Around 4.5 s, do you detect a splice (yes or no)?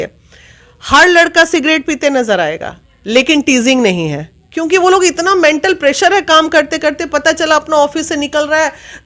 no